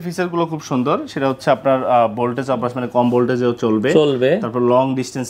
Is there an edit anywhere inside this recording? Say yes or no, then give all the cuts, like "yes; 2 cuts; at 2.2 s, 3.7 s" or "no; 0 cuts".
no; 0 cuts